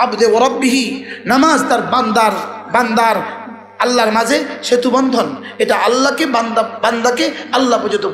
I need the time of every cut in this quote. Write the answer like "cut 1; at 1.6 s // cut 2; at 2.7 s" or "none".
none

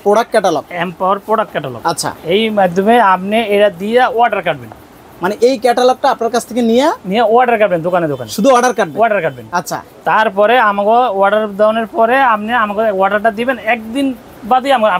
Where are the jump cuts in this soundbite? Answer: none

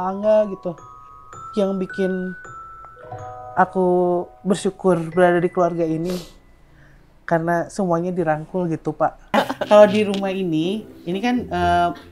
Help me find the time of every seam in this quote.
cut 1; at 9.3 s

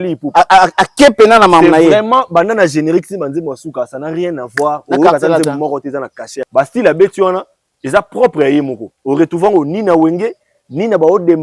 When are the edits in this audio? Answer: cut 1; at 6.3 s

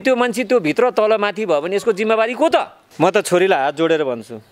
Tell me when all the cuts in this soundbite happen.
cut 1; at 2.8 s

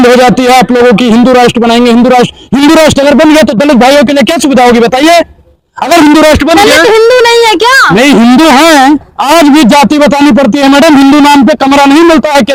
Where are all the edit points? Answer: none

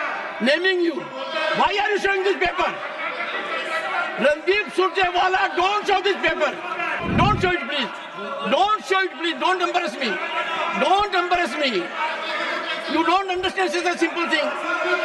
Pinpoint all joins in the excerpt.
cut 1; at 7.0 s

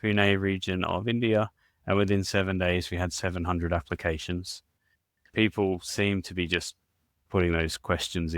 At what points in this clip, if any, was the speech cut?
cut 1; at 5.2 s

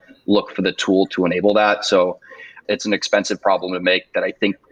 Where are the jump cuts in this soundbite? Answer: cut 1; at 2.5 s

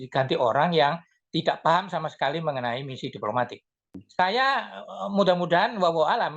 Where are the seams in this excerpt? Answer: cut 1; at 4.0 s

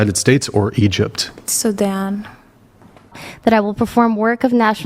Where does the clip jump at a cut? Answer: cut 1; at 3.1 s

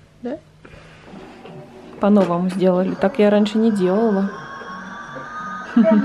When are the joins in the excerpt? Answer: cut 1; at 1.0 s

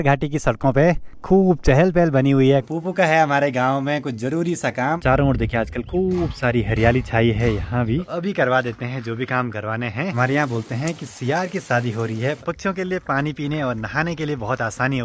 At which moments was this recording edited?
cut 1; at 2.7 s // cut 2; at 5.0 s // cut 3; at 8.1 s // cut 4; at 10.2 s // cut 5; at 12.4 s

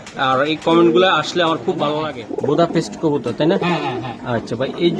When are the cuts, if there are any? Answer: cut 1; at 2.5 s

